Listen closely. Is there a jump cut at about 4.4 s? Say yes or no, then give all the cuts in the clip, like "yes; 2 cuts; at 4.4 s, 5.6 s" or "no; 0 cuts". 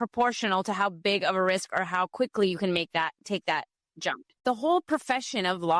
yes; 1 cut; at 4.4 s